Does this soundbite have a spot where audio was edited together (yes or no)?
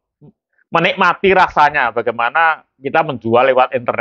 no